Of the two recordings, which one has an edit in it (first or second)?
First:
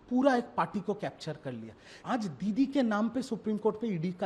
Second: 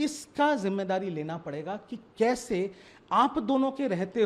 first